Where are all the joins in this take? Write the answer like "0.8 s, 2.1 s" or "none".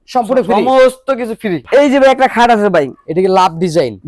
1.6 s